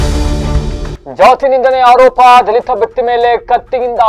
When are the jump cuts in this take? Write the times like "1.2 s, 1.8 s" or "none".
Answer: 0.9 s